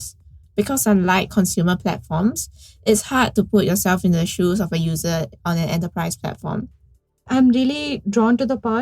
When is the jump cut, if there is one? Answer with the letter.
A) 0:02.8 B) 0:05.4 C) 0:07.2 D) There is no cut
C